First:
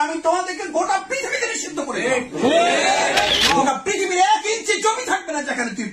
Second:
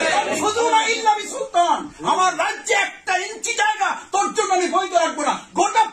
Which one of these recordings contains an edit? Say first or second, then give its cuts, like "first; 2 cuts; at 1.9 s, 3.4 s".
first; 1 cut; at 3.6 s